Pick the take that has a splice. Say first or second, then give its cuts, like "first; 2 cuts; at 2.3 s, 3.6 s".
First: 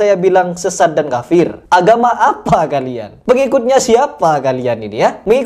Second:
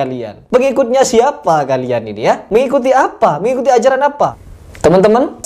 second; 1 cut; at 4.4 s